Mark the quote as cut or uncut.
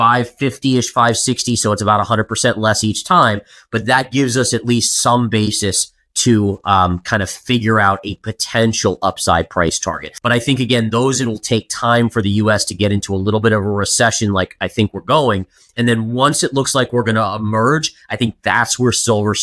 cut